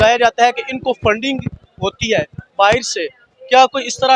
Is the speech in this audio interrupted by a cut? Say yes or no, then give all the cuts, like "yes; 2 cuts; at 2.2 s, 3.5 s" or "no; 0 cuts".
no; 0 cuts